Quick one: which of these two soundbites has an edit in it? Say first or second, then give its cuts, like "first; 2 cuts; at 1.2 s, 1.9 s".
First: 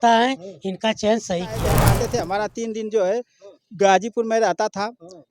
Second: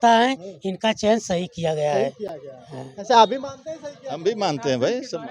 first; 1 cut; at 1.8 s